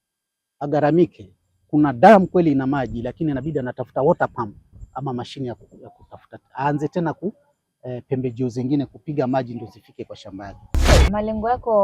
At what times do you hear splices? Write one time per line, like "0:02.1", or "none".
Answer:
0:10.9